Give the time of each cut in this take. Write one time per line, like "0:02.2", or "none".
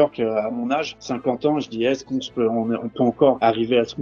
0:00.9